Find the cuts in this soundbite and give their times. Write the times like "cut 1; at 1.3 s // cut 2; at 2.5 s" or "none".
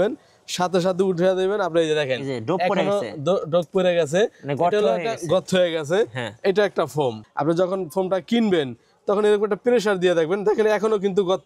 cut 1; at 7.2 s